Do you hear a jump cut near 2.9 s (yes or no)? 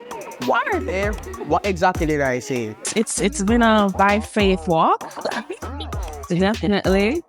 yes